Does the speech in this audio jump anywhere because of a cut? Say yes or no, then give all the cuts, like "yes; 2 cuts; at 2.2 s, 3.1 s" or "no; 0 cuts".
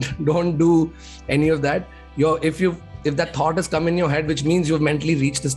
no; 0 cuts